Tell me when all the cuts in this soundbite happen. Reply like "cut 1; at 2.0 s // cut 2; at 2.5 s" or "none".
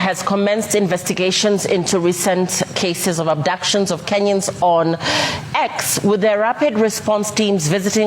none